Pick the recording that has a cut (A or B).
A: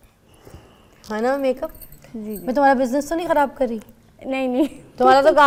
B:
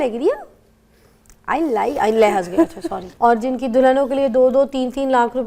B